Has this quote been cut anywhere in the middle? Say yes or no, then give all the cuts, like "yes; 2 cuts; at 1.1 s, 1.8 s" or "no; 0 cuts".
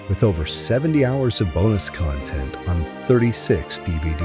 no; 0 cuts